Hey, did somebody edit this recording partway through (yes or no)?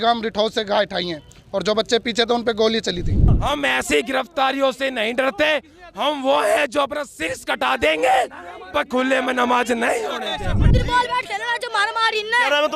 yes